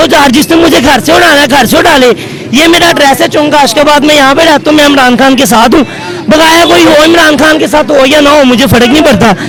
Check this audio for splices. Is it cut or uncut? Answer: uncut